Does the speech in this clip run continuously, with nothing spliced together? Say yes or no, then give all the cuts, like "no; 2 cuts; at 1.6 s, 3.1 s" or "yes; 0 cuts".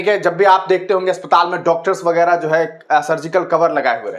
yes; 0 cuts